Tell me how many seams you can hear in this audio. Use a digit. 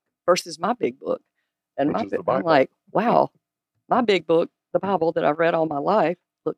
0